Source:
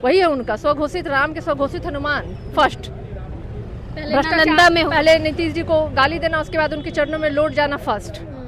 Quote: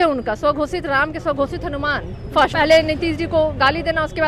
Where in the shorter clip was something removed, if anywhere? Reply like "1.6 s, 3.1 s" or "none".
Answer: 2.5 s